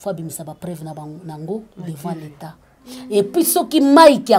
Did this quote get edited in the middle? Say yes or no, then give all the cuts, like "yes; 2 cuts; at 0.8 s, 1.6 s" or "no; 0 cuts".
no; 0 cuts